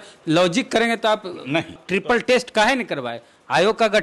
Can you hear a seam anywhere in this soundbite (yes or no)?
yes